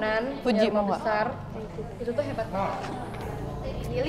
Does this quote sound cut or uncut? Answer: uncut